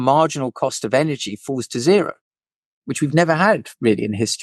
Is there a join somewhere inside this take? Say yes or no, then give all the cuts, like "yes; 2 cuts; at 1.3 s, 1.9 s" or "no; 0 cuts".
no; 0 cuts